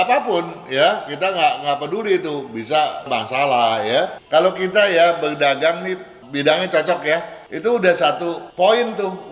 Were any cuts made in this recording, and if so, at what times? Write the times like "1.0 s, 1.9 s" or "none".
4.2 s